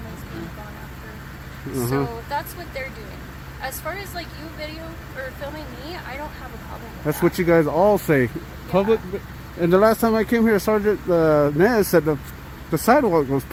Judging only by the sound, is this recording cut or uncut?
uncut